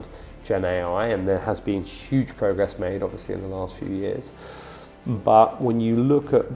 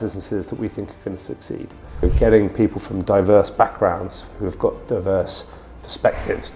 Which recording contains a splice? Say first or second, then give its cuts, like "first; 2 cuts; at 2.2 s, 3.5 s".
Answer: second; 1 cut; at 2.1 s